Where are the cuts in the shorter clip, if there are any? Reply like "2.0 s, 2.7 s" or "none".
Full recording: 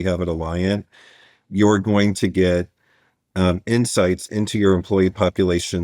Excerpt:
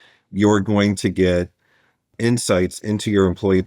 2.1 s